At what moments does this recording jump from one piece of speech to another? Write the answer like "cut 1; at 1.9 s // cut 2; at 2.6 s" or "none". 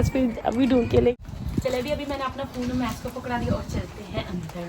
cut 1; at 1.2 s